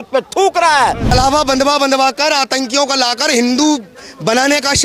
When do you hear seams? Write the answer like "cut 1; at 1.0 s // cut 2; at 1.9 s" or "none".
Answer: cut 1; at 1.0 s